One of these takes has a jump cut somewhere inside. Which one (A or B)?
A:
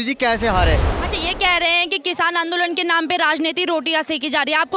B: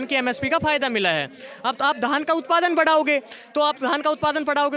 A